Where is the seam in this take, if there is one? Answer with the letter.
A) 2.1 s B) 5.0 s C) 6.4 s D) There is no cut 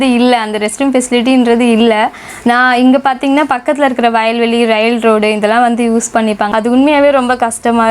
C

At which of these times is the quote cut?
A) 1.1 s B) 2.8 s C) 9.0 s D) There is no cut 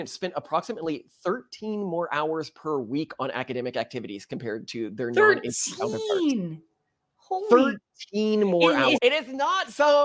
C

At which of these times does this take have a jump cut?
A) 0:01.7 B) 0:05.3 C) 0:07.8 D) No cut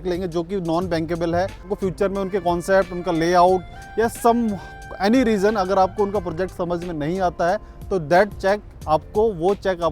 A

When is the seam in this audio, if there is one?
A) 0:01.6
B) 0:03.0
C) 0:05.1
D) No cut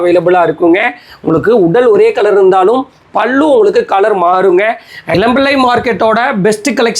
C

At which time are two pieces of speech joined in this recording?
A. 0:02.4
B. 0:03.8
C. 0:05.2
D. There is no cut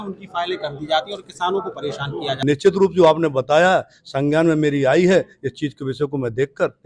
A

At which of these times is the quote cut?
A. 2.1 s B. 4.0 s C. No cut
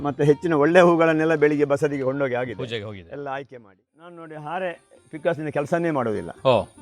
B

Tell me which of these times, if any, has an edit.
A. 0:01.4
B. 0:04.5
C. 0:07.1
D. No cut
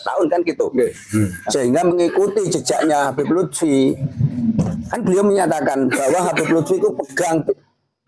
A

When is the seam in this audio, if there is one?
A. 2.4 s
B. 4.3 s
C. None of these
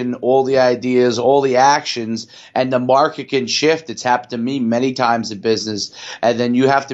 C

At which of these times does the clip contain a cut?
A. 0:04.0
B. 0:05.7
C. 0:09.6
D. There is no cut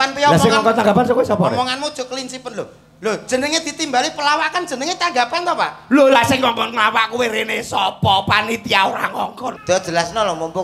C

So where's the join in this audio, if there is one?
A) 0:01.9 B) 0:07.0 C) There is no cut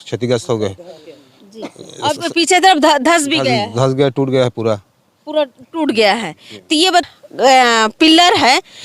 B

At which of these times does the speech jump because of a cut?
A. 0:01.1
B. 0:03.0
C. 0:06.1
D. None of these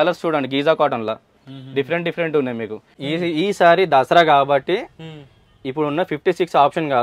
B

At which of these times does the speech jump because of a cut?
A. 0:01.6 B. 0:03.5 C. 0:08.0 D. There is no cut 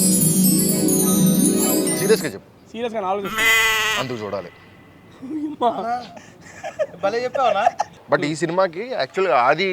C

